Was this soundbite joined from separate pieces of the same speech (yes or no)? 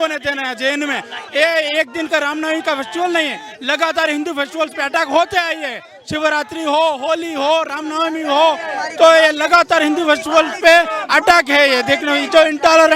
no